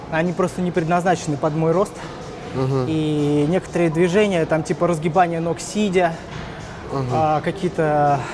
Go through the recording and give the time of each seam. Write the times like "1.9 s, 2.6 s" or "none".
none